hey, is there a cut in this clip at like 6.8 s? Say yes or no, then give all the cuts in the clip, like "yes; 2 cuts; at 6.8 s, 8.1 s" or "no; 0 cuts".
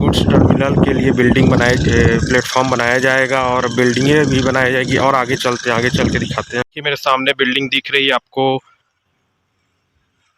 yes; 1 cut; at 6.8 s